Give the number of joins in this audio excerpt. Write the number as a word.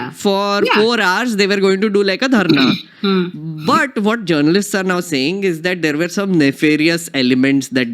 zero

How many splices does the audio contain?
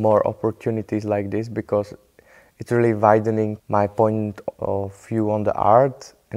one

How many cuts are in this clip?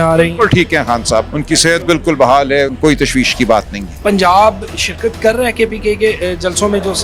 three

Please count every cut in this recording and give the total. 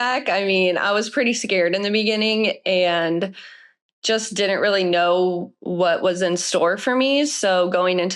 zero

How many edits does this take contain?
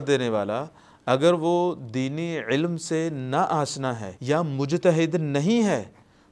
one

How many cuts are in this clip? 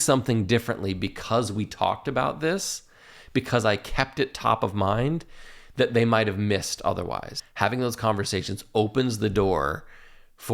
one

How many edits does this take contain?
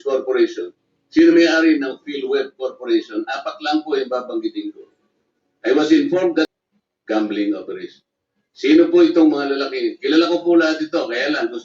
one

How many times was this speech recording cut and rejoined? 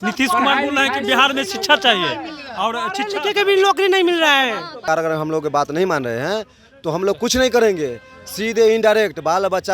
one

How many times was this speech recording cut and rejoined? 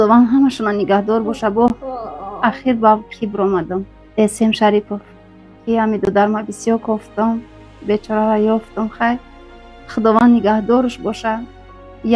one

